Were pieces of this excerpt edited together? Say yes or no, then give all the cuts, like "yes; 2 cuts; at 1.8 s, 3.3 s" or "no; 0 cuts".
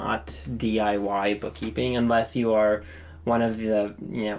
no; 0 cuts